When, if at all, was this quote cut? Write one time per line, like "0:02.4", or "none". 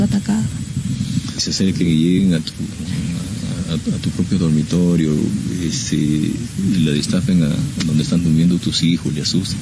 0:01.4